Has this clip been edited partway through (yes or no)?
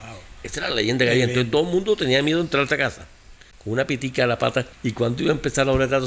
yes